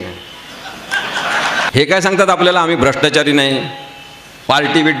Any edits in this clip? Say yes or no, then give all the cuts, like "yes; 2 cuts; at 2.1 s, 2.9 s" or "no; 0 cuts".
yes; 1 cut; at 1.7 s